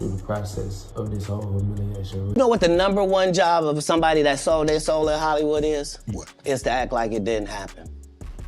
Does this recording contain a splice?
yes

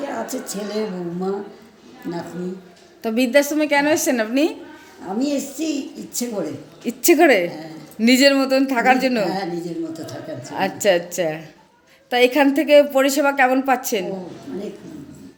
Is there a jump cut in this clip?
no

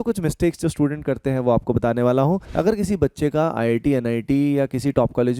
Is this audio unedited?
no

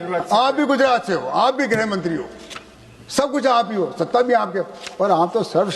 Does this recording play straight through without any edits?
yes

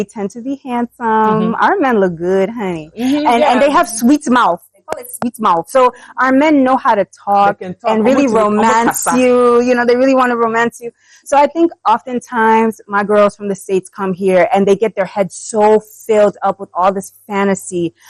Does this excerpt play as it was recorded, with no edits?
yes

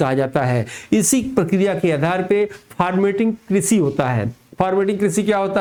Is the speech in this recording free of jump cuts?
yes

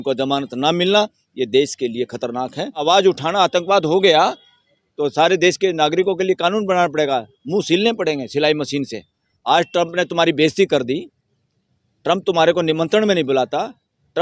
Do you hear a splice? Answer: yes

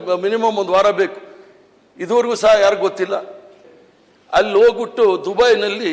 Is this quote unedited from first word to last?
no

